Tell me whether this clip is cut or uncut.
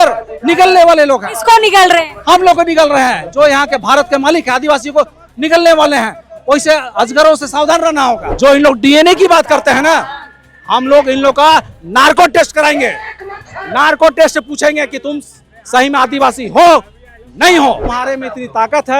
cut